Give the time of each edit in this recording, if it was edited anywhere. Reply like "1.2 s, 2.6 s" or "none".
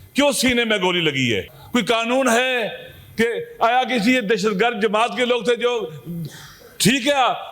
none